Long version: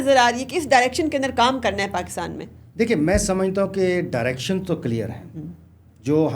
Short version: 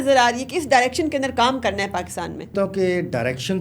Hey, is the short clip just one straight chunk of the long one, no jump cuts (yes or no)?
no